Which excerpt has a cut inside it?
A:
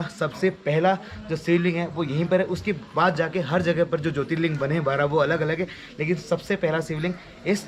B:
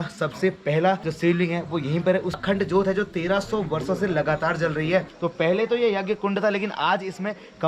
B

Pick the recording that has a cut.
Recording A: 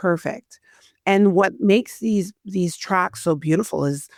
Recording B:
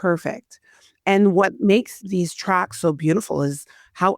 B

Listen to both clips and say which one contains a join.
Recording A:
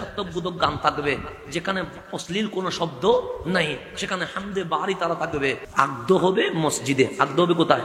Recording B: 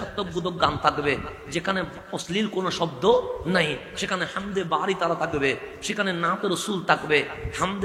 A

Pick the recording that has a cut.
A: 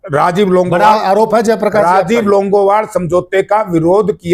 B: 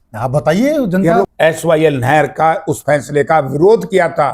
B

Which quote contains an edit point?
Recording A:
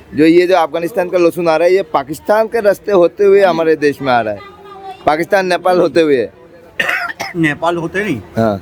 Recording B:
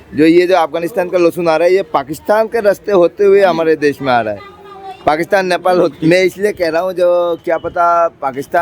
B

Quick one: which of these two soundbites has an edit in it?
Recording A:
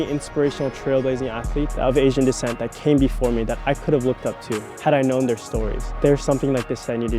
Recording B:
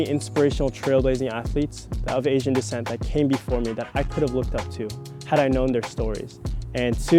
A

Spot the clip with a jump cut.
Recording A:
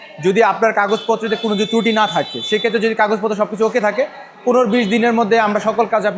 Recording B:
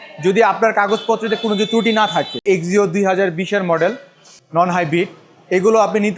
B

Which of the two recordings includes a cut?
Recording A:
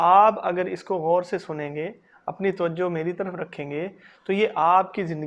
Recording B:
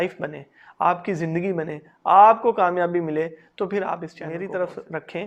B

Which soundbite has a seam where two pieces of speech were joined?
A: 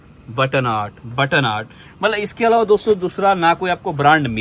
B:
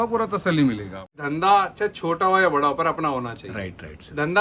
B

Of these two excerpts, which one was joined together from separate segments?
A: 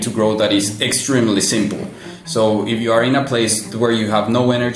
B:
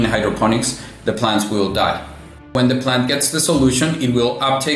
B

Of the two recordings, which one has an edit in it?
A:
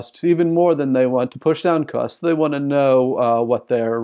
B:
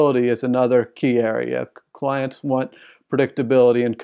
A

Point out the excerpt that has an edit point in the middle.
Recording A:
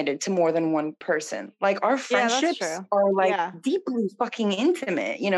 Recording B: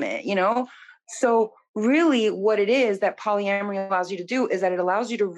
A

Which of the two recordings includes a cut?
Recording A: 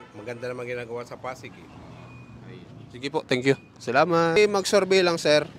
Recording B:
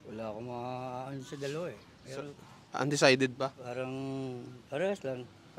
A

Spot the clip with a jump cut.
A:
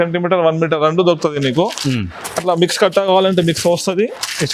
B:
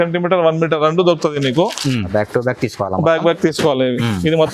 B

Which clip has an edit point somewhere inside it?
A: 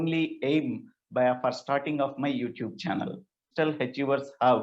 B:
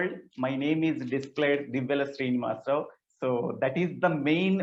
A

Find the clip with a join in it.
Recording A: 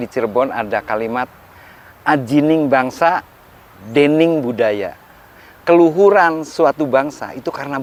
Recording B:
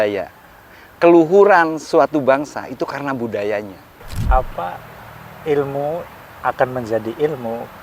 B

